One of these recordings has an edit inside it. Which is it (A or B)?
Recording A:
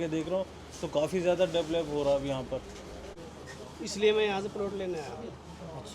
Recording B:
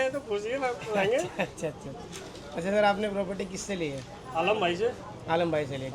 A